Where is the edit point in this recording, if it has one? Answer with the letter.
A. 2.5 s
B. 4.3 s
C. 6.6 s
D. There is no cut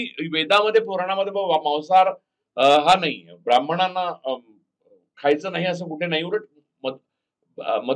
D